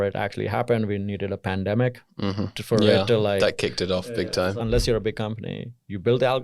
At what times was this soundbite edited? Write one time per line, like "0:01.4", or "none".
0:04.5